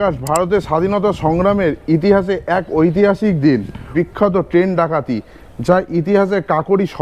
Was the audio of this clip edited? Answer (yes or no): yes